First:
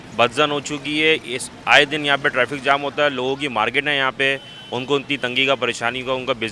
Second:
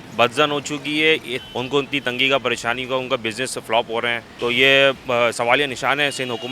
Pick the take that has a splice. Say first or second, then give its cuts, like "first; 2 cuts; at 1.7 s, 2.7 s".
second; 2 cuts; at 1.4 s, 4.2 s